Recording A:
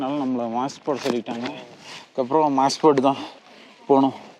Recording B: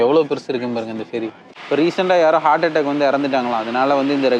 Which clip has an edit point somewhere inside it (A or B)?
B